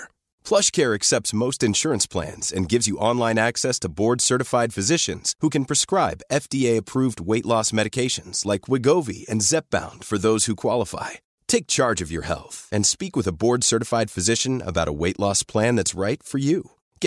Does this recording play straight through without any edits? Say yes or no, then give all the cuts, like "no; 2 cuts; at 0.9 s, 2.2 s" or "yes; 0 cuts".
yes; 0 cuts